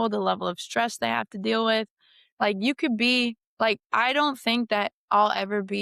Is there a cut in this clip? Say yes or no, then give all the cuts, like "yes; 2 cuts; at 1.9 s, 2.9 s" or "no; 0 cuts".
no; 0 cuts